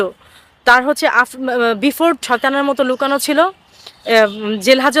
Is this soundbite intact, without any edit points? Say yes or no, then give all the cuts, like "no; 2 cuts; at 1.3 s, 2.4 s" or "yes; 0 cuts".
no; 1 cut; at 2.2 s